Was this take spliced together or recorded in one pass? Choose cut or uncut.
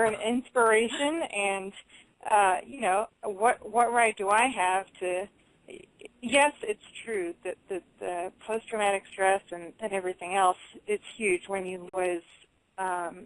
uncut